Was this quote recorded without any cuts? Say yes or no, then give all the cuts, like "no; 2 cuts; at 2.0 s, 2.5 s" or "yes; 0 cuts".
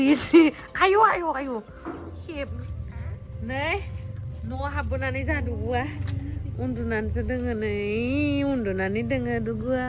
no; 1 cut; at 2.5 s